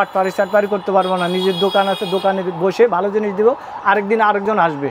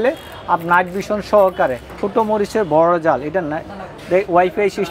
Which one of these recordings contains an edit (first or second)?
second